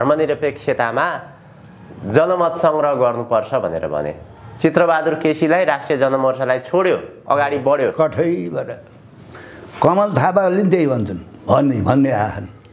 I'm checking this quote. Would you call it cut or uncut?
uncut